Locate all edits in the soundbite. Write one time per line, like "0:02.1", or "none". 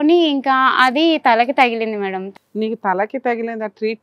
0:02.2